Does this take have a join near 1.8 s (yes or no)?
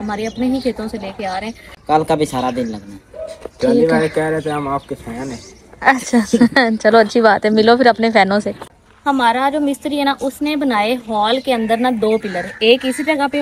yes